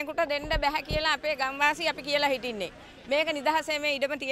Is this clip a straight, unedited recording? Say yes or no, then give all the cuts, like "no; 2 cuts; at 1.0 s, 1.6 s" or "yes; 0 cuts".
yes; 0 cuts